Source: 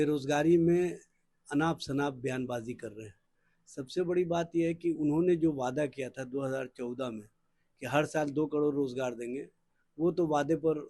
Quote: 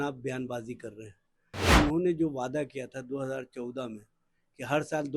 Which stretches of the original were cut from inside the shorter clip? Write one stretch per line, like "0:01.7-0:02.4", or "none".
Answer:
0:03.7-0:05.0